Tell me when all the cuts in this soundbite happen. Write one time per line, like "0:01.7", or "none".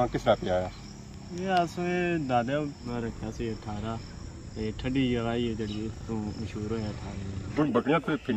0:02.8
0:07.5